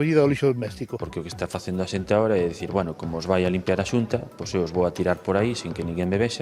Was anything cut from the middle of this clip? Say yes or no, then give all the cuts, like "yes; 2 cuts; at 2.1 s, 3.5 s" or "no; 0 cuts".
yes; 1 cut; at 1.0 s